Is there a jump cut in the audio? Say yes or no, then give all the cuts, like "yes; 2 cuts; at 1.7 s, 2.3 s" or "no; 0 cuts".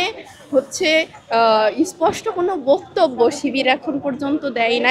no; 0 cuts